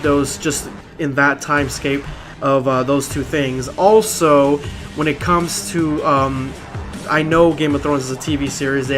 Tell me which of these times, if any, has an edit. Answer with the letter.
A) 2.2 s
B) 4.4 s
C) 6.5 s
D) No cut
C